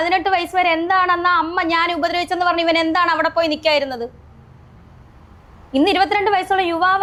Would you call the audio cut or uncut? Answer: uncut